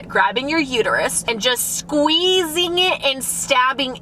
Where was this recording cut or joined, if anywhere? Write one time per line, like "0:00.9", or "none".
0:01.2